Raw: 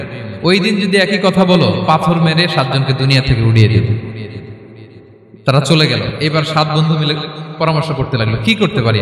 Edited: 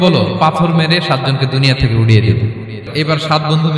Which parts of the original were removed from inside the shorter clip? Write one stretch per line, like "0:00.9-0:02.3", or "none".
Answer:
0:04.3-0:06.1